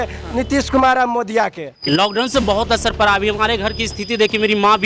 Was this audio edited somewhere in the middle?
yes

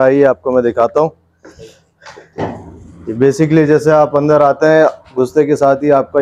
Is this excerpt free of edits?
yes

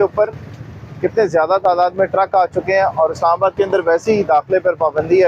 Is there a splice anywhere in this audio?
no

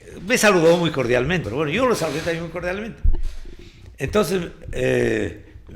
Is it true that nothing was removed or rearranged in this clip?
no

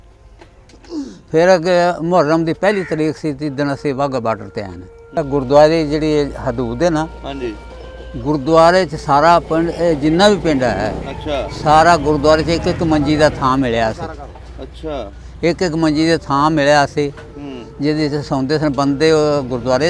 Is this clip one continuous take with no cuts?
no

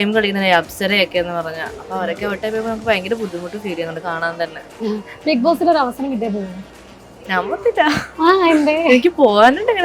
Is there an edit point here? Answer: no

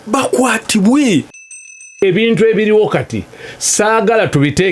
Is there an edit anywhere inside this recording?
yes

